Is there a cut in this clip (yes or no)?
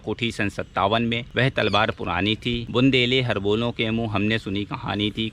yes